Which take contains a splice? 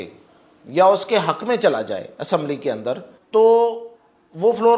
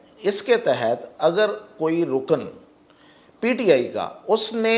first; 1 cut; at 3.1 s

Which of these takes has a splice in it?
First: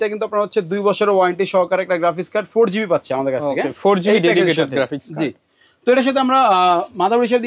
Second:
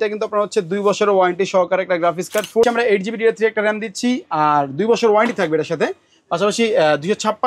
second; 1 cut; at 2.6 s

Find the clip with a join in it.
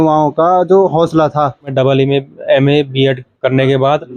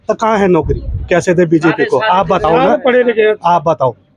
first; 1 cut; at 1.7 s

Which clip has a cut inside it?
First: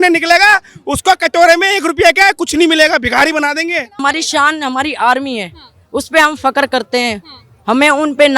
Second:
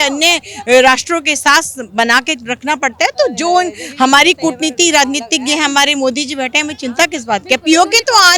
first; 1 cut; at 4.0 s

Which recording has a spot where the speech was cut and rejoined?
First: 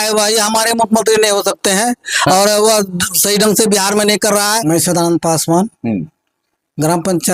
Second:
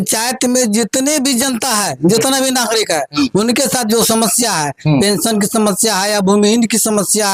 first; 1 cut; at 4.6 s

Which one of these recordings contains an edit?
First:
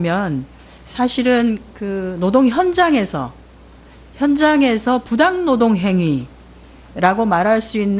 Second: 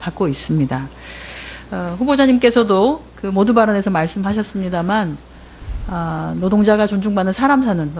second; 1 cut; at 5.7 s

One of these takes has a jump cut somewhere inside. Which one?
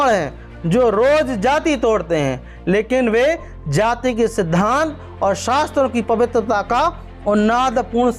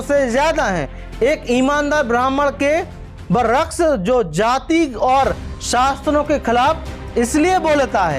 second; 1 cut; at 0.9 s

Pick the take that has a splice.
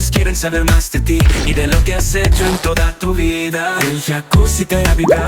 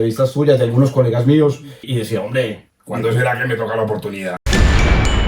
second; 3 cuts; at 1.9 s, 2.7 s, 4.5 s

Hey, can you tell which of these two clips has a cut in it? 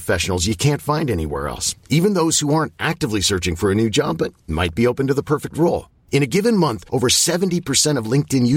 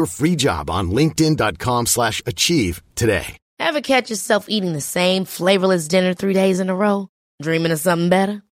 second; 1 cut; at 3.4 s

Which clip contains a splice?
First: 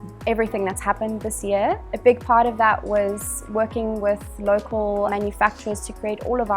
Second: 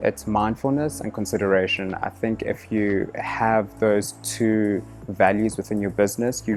first; 2 cuts; at 1.9 s, 5.1 s

